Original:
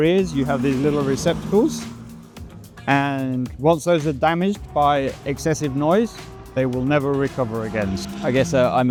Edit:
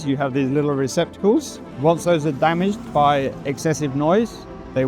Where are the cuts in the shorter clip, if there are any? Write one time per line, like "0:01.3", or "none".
0:01.7